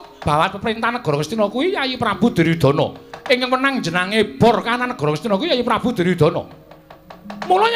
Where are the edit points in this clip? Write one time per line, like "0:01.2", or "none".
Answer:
none